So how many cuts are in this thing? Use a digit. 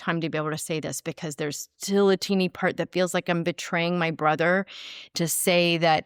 0